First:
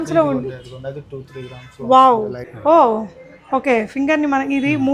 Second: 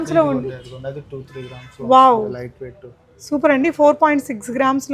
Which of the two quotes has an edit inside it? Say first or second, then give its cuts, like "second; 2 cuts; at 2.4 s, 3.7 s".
first; 1 cut; at 2.4 s